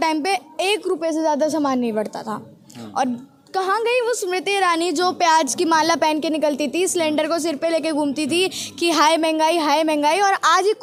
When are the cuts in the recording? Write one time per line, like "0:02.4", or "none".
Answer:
none